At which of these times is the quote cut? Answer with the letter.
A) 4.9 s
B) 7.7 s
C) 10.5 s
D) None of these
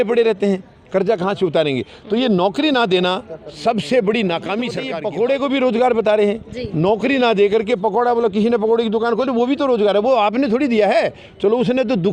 A